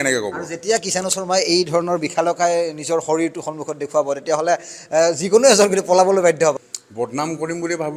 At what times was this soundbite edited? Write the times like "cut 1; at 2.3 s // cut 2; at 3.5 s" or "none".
cut 1; at 6.5 s